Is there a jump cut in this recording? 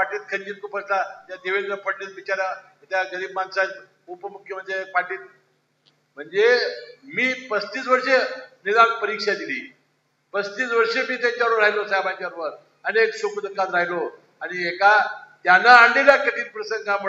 no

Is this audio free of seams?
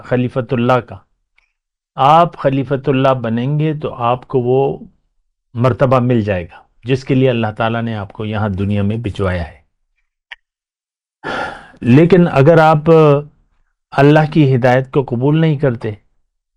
yes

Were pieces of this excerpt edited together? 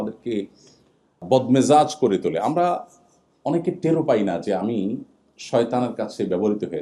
yes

